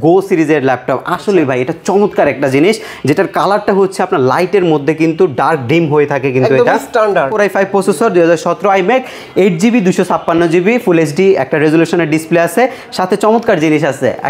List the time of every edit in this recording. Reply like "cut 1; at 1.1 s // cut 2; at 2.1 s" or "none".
cut 1; at 7.3 s